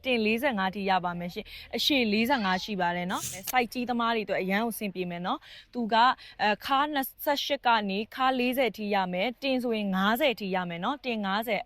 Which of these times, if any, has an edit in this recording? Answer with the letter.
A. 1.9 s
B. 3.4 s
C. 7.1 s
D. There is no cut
B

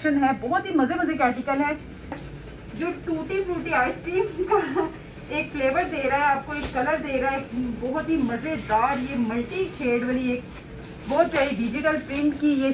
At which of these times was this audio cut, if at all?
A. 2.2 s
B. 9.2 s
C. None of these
A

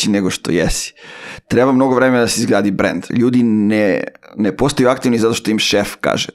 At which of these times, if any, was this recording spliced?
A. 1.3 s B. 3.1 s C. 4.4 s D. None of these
B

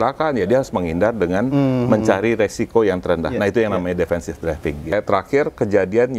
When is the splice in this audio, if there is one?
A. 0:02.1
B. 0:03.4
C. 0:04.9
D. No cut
C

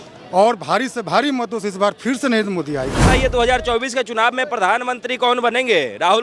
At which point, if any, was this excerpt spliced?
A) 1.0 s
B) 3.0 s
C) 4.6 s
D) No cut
B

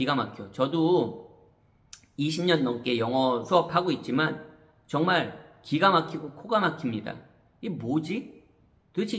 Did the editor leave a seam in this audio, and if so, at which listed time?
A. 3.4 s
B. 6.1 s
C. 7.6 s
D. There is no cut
A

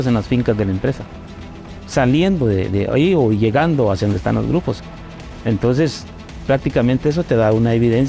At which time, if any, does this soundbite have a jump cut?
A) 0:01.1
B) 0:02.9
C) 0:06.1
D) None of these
D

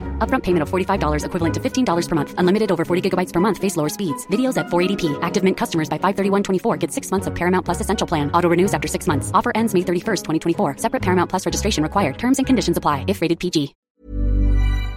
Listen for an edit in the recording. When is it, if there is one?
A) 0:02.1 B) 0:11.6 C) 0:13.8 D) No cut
C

